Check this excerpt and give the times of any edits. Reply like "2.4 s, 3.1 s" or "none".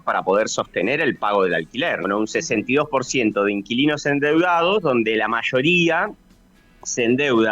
2.0 s